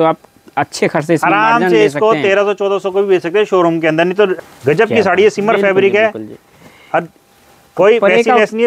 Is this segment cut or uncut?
cut